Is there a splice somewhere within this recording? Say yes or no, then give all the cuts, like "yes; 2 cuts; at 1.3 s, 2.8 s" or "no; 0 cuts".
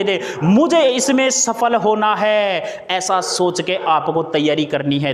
no; 0 cuts